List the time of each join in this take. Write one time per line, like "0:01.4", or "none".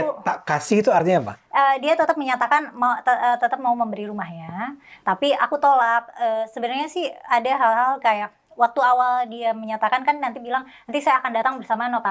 none

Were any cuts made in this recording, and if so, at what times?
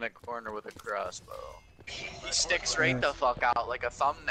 0:01.9

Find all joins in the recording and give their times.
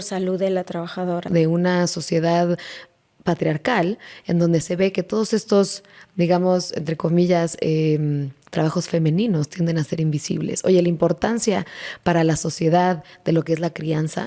0:01.3

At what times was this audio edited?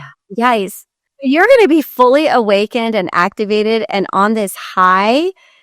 0:01.1

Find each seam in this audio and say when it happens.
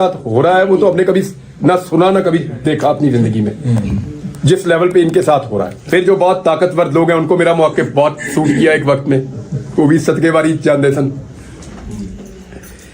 0:05.8

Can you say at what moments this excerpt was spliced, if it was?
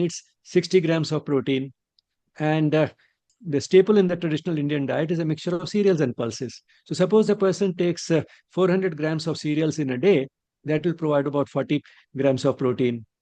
0:03.4

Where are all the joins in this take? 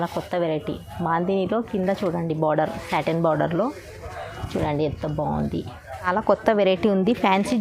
0:06.1

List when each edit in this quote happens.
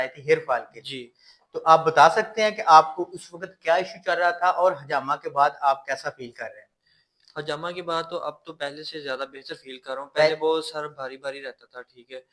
none

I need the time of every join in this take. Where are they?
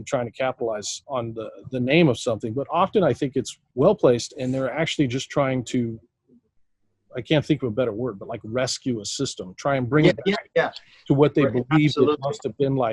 0:00.9
0:03.6

